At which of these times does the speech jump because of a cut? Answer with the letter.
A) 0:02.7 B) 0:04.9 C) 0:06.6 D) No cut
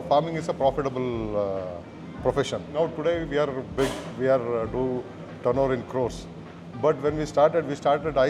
A